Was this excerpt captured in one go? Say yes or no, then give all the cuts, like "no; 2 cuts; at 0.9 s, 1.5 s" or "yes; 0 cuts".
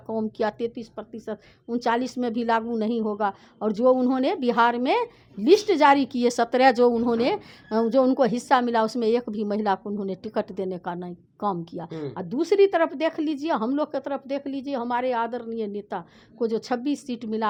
yes; 0 cuts